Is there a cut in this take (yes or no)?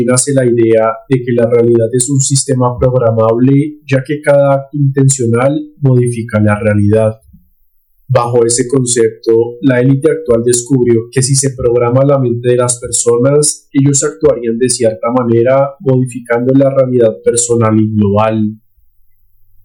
no